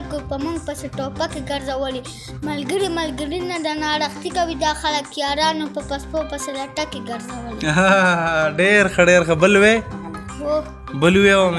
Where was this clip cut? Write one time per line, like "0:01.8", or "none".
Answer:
none